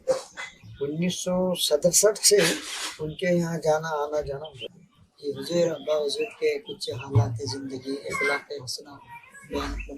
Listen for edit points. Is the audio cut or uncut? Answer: cut